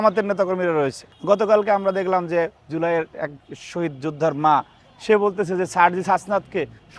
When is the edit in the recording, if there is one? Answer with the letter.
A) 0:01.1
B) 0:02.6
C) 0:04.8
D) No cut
A